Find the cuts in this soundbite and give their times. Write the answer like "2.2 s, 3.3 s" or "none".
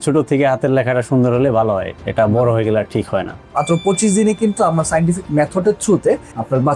3.4 s